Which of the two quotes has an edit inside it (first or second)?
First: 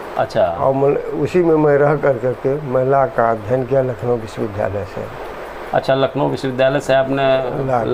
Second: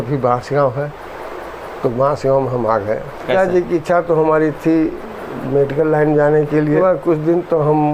second